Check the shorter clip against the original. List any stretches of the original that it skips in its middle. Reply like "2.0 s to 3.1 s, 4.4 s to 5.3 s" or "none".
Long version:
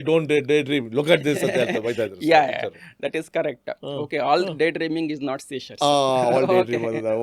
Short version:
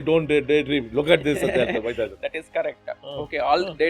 2.1 s to 2.9 s